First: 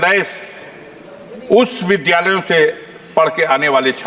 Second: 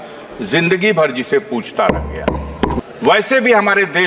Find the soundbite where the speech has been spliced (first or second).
second